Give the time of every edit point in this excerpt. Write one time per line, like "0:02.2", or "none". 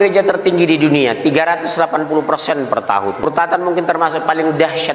0:03.2